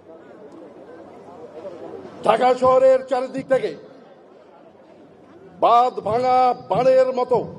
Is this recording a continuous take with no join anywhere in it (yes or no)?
yes